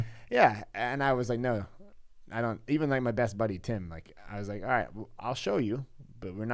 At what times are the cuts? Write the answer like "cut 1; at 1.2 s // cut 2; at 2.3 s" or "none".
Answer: none